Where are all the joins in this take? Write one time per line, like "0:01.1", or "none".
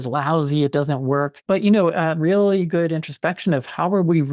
0:01.4